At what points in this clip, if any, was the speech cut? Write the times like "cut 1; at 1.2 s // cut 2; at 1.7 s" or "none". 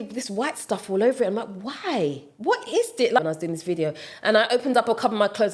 cut 1; at 3.2 s